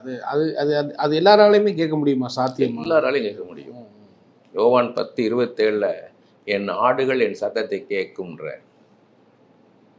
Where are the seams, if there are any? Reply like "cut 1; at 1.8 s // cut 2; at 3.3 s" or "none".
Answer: none